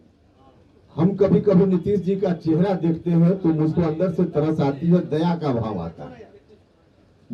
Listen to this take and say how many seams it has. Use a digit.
0